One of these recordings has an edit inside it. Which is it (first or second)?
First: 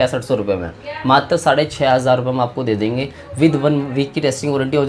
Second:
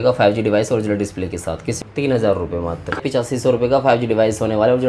second